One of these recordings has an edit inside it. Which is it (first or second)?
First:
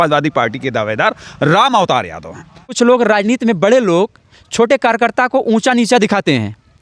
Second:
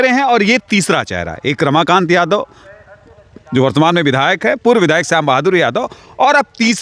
first